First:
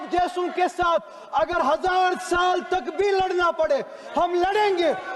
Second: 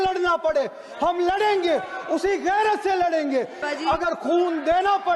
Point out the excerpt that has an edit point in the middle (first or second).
second